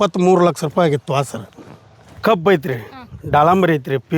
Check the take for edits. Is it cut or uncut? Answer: cut